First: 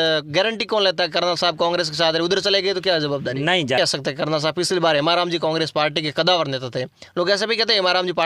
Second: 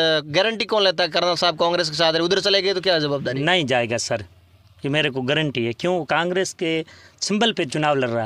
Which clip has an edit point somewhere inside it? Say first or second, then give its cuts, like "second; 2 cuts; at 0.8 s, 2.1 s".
first; 1 cut; at 3.8 s